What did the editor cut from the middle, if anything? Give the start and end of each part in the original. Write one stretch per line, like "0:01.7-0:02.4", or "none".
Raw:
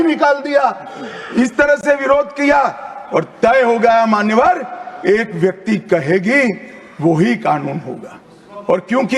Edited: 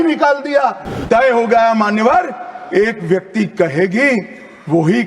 0:01.0-0:03.3